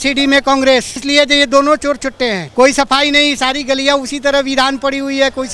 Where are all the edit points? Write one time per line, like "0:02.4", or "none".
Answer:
0:01.0
0:02.4